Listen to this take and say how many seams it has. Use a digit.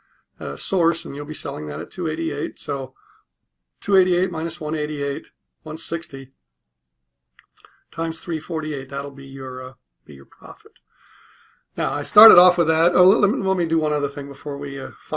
0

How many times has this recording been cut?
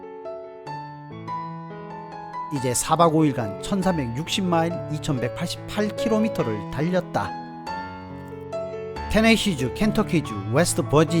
1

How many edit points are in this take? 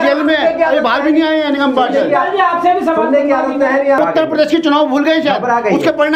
1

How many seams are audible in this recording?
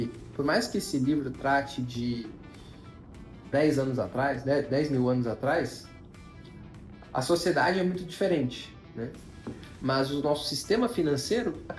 0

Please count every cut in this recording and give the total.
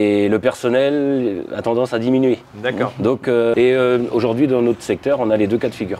1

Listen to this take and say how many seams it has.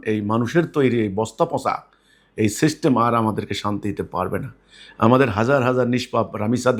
0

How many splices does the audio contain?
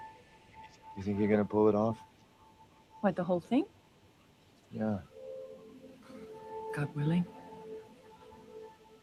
0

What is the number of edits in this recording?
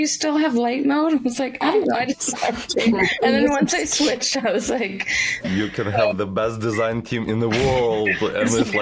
1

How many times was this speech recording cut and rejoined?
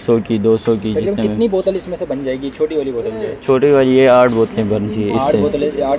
0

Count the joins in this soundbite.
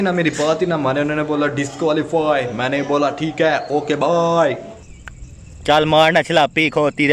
1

